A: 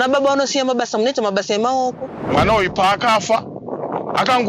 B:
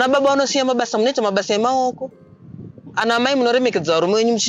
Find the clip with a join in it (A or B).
A